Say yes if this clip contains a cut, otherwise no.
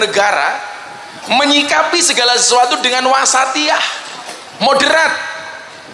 no